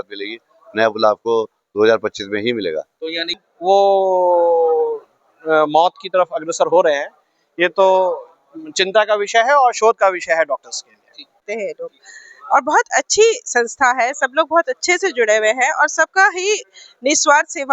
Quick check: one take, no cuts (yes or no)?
no